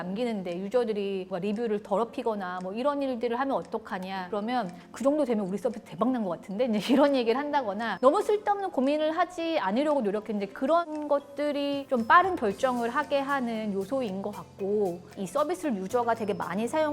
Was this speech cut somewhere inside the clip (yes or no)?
yes